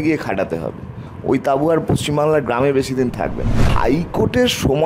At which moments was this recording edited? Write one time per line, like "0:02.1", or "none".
0:03.7